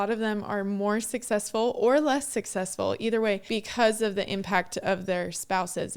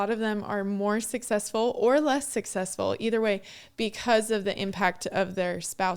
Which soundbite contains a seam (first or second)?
first